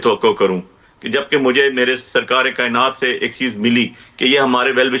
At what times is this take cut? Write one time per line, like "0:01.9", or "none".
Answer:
none

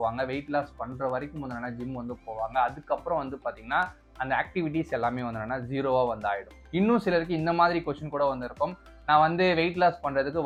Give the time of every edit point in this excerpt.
none

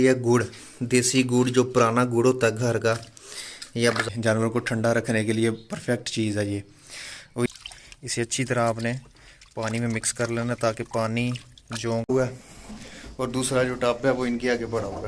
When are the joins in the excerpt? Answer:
0:04.0
0:07.5
0:12.1

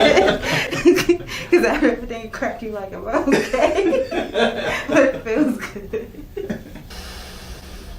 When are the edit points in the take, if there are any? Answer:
0:06.9

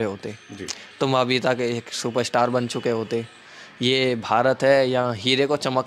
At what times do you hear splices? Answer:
none

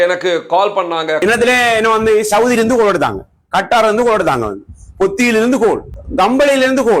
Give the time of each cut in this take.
0:01.2
0:06.0

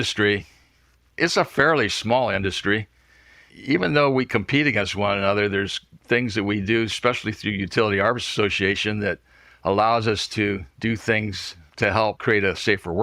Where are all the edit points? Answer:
0:10.7

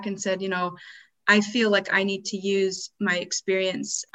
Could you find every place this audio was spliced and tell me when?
none

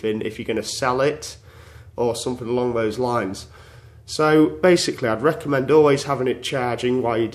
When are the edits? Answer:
0:02.9

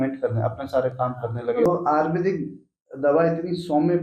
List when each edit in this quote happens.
0:01.7

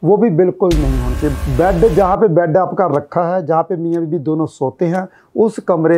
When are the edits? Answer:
0:01.4

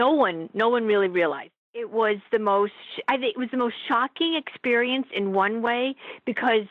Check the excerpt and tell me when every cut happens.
0:01.6
0:02.9

